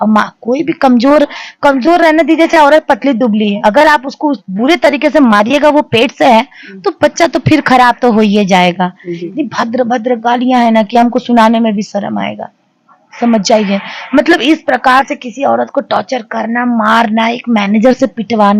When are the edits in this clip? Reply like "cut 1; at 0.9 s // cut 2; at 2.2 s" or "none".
cut 1; at 9.2 s